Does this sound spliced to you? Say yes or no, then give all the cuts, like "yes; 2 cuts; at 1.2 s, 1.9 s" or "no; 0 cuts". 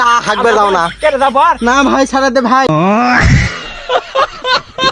yes; 1 cut; at 2.7 s